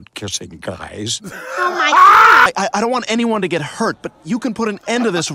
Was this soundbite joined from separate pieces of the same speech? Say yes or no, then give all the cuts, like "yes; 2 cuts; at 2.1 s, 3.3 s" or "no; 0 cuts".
yes; 1 cut; at 2.5 s